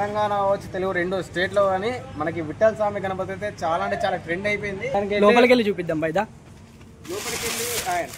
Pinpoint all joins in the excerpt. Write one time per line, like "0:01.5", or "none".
0:04.9